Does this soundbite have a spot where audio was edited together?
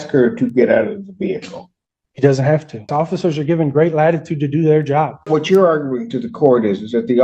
yes; 2 cuts; at 2.9 s, 5.2 s

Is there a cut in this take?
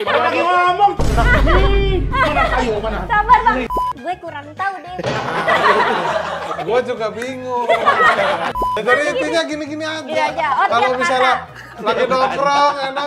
yes; 2 cuts; at 3.6 s, 8.5 s

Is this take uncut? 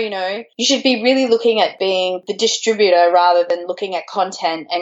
no; 1 cut; at 2.2 s

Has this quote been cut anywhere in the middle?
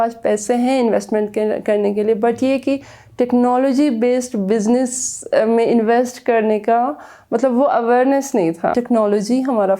yes; 1 cut; at 8.7 s

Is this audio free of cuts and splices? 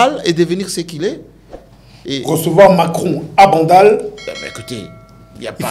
yes; 0 cuts

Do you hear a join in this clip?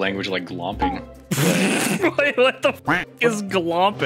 no; 0 cuts

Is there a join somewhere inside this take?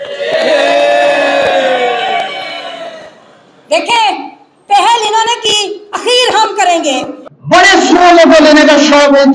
yes; 1 cut; at 7.3 s

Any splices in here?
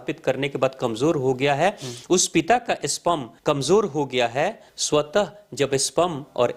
yes; 2 cuts; at 3.3 s, 4.7 s

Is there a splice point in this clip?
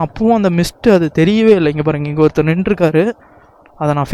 no; 0 cuts

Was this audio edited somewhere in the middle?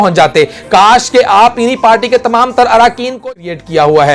yes; 1 cut; at 3.2 s

